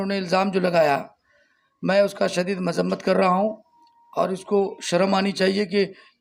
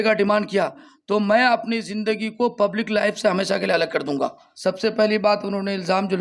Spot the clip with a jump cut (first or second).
second